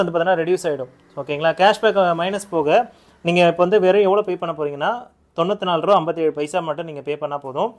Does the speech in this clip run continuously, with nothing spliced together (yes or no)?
yes